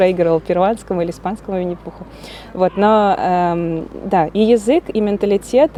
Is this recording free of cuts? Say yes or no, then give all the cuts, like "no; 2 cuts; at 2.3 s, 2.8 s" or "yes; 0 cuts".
yes; 0 cuts